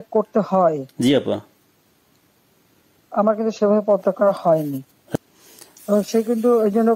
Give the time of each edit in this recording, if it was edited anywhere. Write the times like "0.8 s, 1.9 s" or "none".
5.0 s